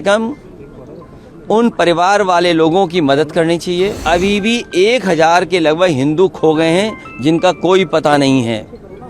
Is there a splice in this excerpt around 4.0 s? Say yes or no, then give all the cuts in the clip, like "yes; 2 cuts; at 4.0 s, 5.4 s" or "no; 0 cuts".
yes; 1 cut; at 4.0 s